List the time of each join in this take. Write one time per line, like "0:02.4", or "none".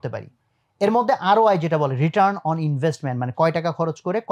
none